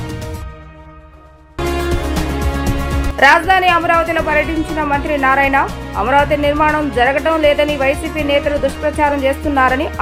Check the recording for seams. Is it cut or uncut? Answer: uncut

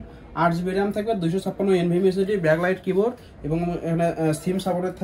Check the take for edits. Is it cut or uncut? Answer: uncut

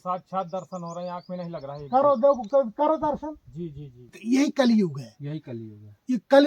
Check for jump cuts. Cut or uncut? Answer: cut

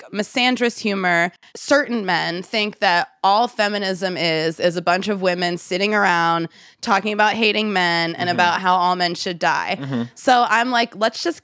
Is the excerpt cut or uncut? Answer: uncut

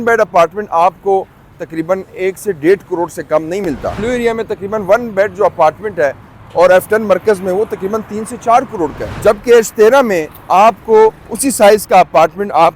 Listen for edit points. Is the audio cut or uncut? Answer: cut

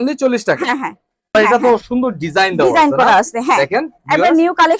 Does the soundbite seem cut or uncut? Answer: cut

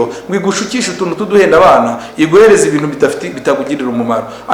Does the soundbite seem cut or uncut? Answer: uncut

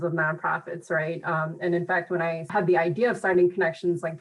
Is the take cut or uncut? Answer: cut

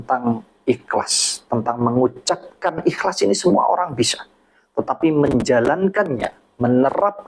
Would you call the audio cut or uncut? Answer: uncut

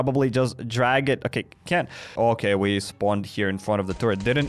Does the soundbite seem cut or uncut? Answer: cut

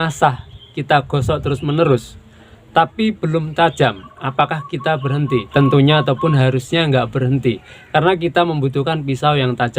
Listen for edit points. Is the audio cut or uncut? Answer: cut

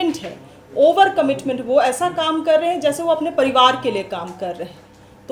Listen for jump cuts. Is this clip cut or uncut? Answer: uncut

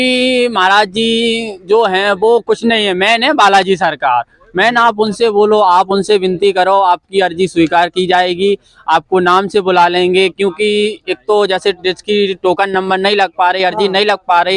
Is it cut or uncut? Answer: uncut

